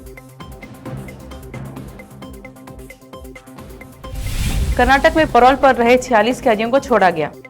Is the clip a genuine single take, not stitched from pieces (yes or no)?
no